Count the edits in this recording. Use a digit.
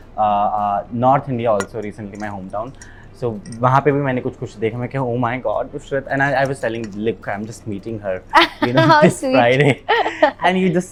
0